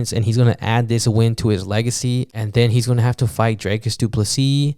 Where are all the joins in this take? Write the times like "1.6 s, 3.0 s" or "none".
2.4 s